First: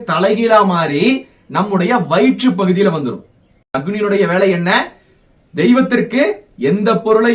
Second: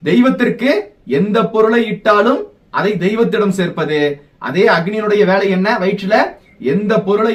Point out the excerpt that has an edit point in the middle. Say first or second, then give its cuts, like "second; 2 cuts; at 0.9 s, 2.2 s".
first; 1 cut; at 3.8 s